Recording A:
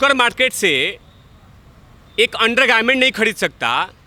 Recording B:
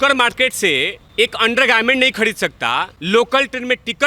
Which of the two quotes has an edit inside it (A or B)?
B